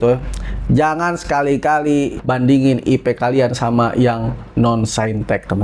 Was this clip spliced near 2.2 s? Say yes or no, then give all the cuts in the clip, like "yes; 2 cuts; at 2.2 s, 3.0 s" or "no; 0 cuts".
yes; 1 cut; at 2.2 s